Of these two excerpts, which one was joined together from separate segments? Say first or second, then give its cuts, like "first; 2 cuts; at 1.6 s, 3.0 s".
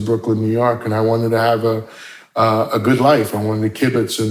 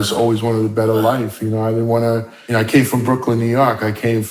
second; 1 cut; at 2.3 s